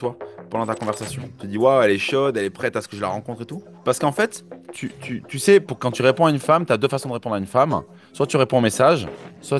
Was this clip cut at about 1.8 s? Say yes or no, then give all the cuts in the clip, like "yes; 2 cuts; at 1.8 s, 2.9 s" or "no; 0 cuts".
no; 1 cut; at 3.5 s